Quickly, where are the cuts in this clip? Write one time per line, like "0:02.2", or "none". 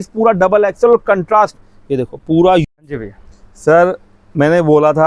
0:02.6